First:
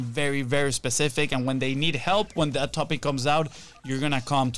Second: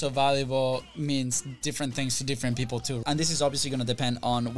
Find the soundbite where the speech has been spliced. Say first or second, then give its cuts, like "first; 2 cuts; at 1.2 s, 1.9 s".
second; 2 cuts; at 0.9 s, 3.0 s